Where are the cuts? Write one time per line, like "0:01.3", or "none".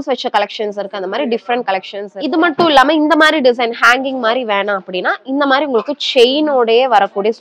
0:02.0